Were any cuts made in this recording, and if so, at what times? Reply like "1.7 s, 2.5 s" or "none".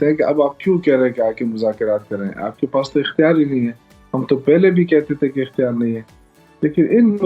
none